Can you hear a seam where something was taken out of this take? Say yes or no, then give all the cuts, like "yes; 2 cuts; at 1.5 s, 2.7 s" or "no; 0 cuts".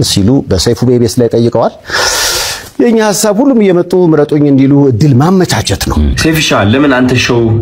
yes; 1 cut; at 6.2 s